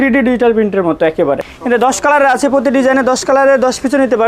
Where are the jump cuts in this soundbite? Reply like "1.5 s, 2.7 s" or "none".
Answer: 1.5 s